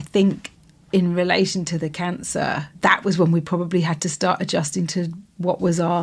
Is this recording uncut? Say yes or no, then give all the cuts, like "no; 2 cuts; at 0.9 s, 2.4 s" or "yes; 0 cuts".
no; 1 cut; at 2.7 s